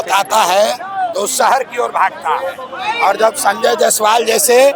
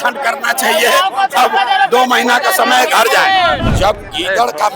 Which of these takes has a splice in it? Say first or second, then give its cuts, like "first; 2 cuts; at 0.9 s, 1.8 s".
second; 1 cut; at 3.7 s